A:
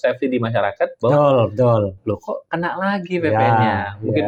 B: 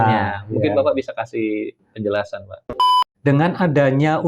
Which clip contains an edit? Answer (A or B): B